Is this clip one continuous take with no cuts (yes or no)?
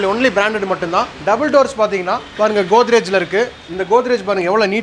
yes